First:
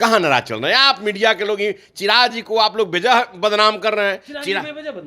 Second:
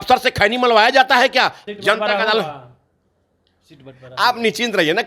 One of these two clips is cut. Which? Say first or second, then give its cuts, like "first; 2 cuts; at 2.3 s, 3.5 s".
second; 1 cut; at 1.6 s